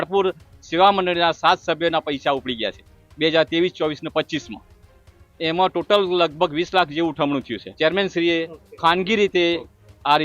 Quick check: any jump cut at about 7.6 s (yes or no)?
yes